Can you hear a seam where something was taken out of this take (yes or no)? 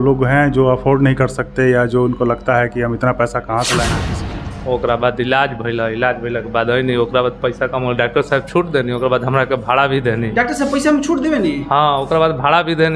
yes